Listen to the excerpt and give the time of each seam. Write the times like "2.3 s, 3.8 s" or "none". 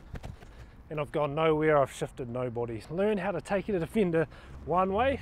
2.8 s